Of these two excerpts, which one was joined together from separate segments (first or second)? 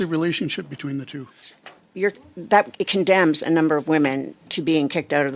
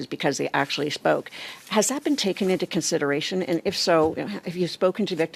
first